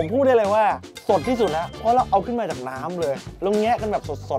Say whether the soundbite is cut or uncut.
cut